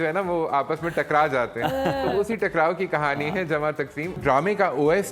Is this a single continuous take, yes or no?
no